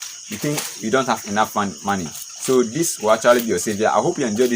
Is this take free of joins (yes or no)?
yes